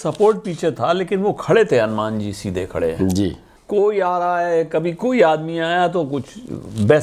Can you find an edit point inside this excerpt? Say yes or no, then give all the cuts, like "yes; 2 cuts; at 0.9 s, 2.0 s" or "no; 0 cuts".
yes; 1 cut; at 3.5 s